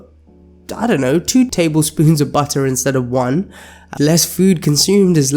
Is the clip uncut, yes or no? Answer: no